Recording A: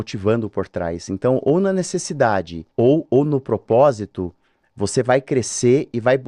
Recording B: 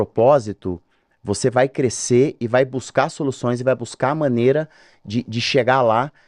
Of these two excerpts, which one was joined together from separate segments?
A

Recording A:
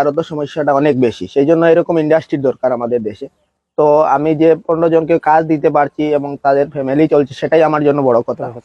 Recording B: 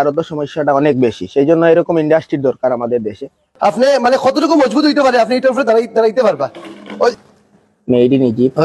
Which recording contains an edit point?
B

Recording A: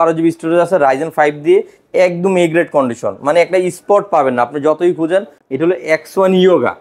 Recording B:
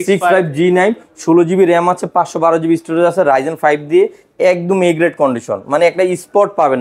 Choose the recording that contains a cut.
A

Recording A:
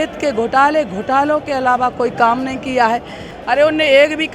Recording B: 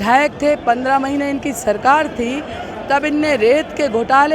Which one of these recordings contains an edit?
A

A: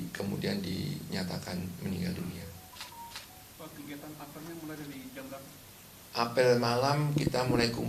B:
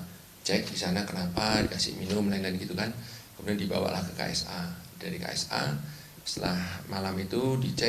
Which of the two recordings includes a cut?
B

